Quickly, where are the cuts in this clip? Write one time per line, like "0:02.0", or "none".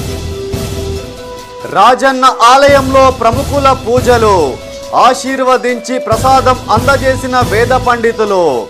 0:01.2